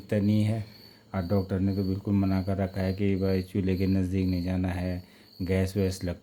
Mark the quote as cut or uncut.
uncut